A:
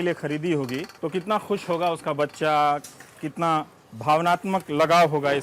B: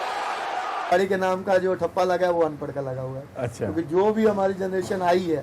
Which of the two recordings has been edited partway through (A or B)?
B